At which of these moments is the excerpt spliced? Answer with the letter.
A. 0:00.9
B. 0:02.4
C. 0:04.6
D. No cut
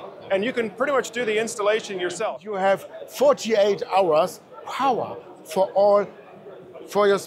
B